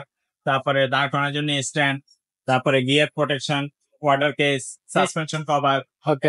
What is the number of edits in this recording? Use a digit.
0